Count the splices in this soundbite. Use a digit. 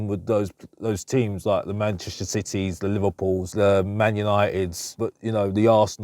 2